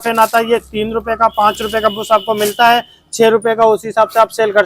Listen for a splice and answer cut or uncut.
uncut